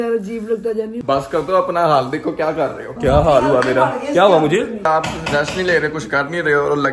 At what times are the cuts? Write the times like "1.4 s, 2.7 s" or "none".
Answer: 1.0 s, 4.9 s

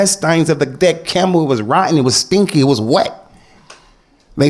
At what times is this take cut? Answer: none

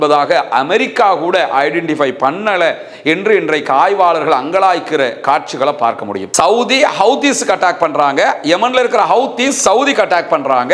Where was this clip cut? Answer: 6.2 s

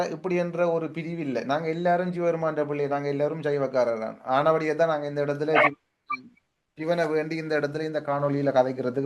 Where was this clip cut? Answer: none

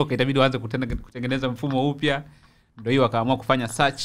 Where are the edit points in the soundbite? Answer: none

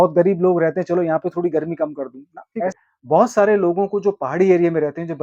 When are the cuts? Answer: 2.7 s

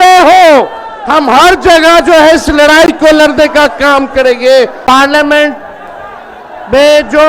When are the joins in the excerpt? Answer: 4.8 s

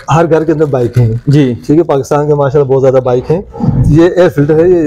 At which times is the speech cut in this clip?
none

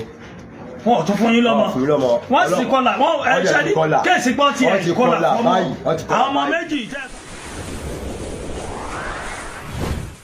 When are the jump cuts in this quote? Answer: 6.9 s

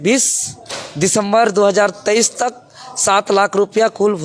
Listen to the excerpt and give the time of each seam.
none

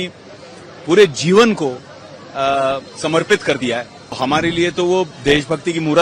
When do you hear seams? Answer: 4.2 s

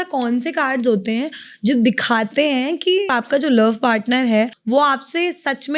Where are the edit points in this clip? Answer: 3.1 s, 4.6 s

